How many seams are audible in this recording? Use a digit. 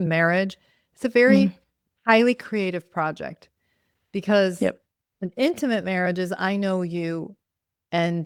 0